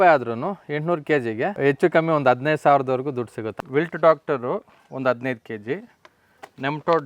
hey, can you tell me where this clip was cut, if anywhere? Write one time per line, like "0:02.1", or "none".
0:01.5
0:03.4